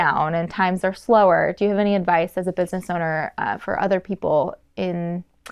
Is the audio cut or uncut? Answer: uncut